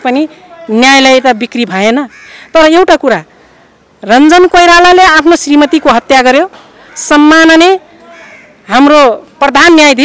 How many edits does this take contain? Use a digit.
0